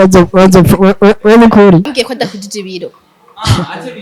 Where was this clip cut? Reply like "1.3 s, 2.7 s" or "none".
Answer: 1.9 s